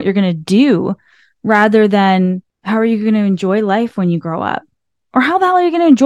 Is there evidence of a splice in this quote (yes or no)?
yes